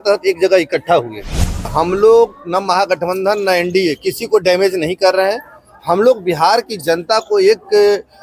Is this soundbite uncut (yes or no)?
no